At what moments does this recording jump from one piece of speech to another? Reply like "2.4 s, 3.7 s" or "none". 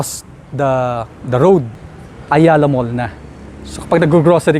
1.8 s